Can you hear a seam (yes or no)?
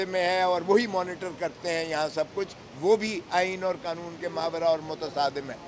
no